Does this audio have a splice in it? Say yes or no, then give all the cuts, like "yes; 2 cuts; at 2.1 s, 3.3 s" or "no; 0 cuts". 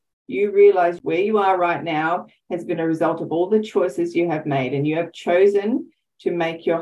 yes; 1 cut; at 1.0 s